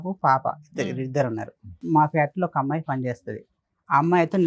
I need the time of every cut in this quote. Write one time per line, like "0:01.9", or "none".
0:01.8